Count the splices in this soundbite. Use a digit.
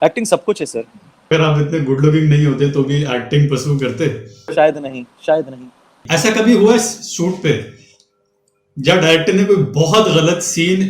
3